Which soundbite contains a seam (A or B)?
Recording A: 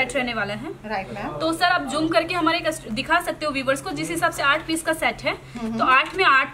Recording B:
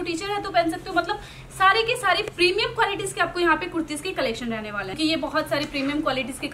B